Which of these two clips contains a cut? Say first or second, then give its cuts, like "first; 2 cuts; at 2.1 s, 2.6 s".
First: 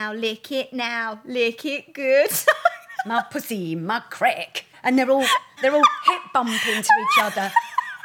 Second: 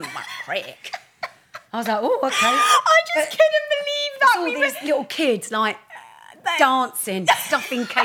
first; 2 cuts; at 4.7 s, 5.5 s